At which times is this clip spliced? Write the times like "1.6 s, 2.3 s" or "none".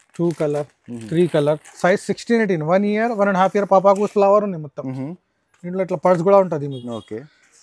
4.1 s

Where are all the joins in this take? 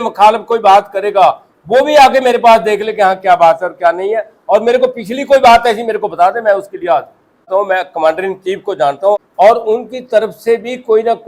7.5 s, 9.1 s

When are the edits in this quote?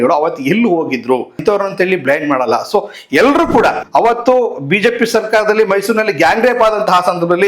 1.4 s, 3.8 s

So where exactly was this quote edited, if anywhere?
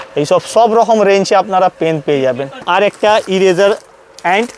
2.6 s

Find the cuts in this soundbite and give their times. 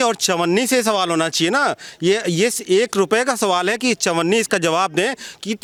none

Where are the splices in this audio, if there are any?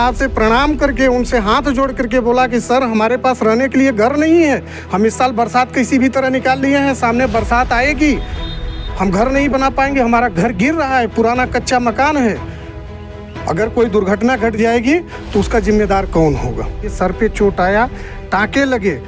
16.9 s

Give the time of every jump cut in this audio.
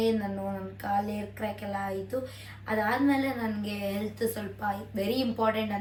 none

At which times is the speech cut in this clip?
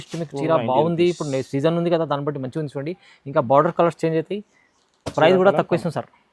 none

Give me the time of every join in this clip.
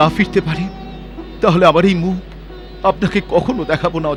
none

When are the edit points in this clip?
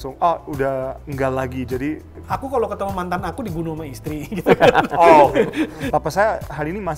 2.1 s, 5.8 s

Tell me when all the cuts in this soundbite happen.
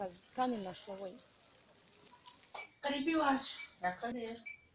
2.7 s, 4.1 s

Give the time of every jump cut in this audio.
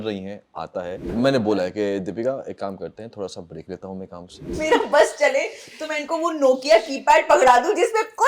1.1 s, 4.4 s

